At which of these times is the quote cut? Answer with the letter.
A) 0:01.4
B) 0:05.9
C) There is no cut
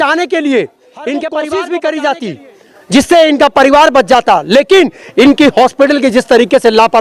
A